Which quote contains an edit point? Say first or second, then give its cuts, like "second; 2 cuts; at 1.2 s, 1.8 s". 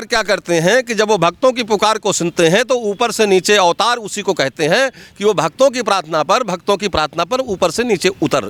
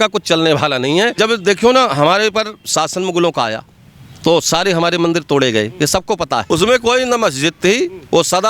second; 2 cuts; at 1.2 s, 6.4 s